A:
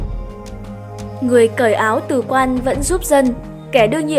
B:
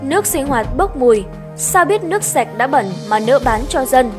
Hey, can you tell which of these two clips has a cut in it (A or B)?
A